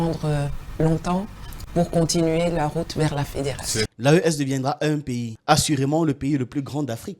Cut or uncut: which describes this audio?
cut